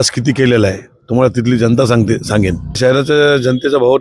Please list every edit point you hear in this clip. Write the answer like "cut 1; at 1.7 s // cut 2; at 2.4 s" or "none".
cut 1; at 2.8 s